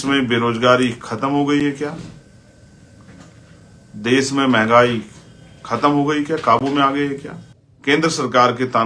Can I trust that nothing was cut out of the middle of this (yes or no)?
no